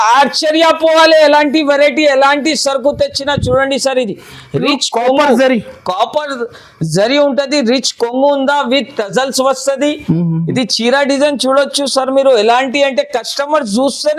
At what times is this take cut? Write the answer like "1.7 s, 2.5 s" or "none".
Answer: none